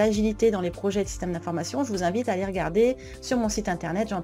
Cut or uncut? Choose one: uncut